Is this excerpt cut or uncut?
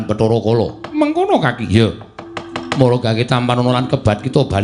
uncut